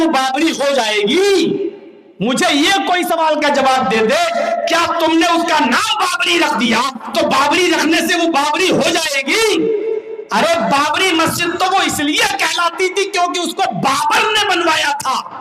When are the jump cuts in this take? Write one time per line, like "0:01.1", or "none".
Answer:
none

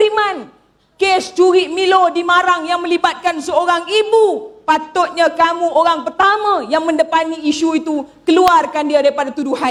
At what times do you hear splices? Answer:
none

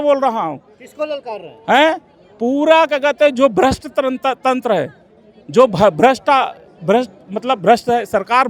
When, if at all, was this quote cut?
none

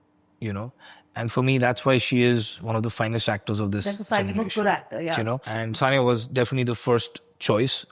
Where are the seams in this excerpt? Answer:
0:05.5

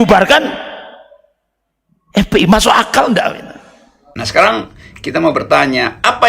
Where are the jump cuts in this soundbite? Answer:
0:04.2

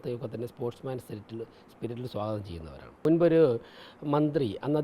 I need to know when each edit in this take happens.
0:03.0

